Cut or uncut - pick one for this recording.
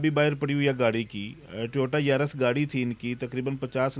uncut